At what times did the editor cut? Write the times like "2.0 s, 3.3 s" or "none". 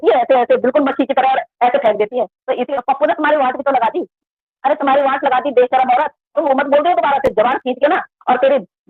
2.7 s, 6.4 s